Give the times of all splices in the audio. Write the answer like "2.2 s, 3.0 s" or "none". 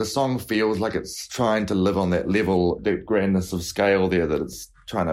1.2 s, 2.9 s